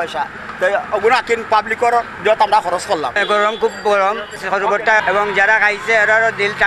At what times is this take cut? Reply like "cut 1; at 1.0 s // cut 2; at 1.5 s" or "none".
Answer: cut 1; at 3.2 s // cut 2; at 4.6 s